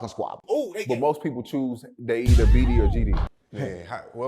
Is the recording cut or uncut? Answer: cut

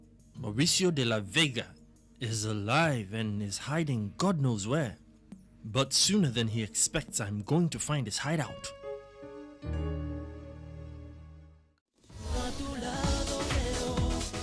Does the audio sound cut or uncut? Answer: cut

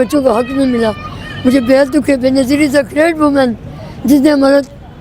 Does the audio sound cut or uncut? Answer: uncut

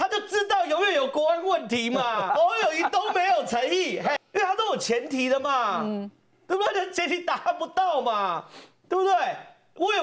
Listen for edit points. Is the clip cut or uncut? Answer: cut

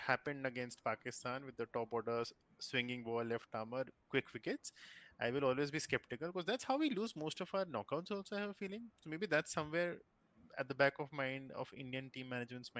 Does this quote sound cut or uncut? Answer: uncut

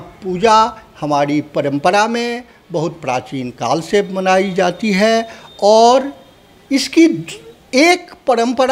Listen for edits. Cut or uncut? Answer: uncut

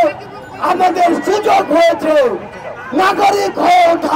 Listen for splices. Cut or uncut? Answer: uncut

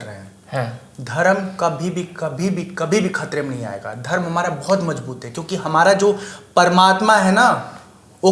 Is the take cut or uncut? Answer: uncut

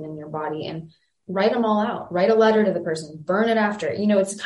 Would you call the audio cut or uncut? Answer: cut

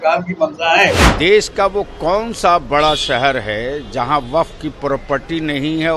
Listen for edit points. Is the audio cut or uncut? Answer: cut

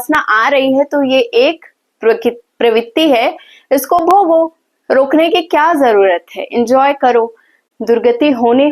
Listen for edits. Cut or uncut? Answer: cut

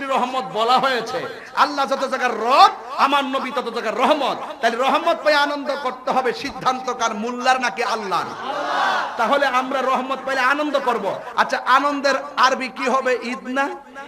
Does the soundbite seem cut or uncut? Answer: uncut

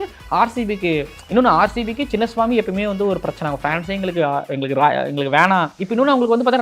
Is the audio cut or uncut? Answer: uncut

